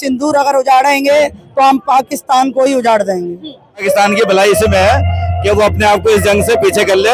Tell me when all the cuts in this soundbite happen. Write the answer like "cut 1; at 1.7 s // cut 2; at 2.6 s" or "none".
cut 1; at 3.8 s